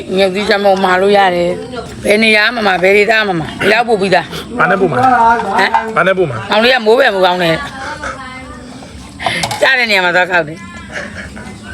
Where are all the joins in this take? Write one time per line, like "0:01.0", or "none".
0:01.8
0:03.5